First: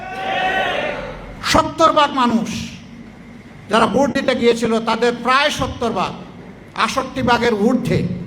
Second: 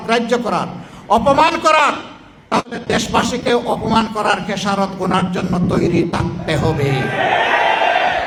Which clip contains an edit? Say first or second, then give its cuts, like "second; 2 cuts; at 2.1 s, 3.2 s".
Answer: first; 1 cut; at 1.3 s